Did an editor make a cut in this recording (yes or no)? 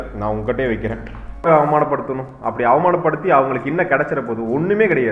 yes